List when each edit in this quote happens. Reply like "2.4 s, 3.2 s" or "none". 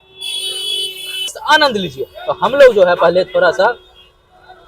1.4 s